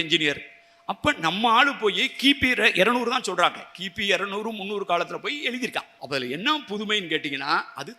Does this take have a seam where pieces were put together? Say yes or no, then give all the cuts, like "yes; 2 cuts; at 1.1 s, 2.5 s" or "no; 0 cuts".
yes; 1 cut; at 5.9 s